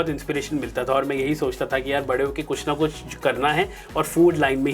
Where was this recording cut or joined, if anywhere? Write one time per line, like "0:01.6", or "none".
none